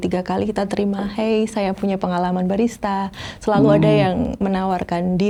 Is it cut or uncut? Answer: uncut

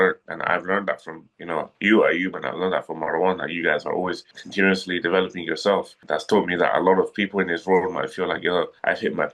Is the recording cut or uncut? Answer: uncut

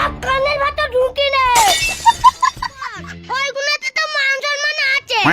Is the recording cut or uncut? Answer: cut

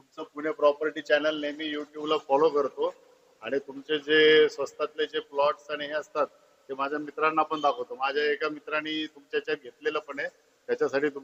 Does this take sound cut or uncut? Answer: uncut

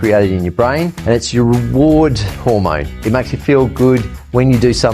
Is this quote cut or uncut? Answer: cut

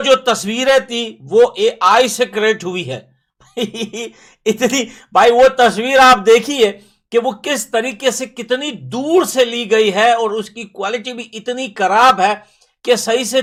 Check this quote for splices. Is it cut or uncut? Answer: uncut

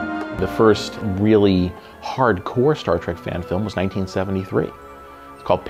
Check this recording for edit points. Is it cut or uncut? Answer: uncut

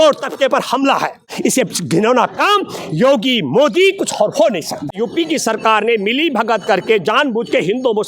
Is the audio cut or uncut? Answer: cut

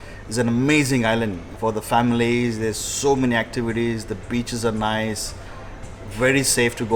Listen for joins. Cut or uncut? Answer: cut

